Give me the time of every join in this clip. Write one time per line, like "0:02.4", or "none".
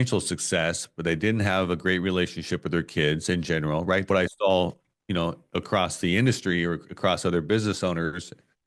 0:04.0